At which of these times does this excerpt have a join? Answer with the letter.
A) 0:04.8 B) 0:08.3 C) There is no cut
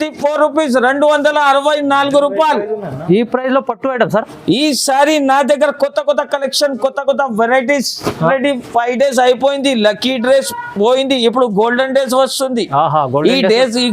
B